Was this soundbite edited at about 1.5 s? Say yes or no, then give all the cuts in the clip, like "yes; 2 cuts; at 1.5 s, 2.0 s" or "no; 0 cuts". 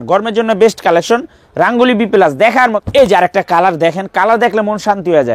no; 1 cut; at 2.8 s